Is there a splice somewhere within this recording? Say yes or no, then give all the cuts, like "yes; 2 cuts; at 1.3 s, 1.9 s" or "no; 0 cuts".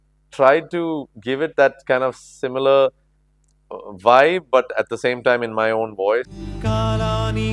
yes; 1 cut; at 6.3 s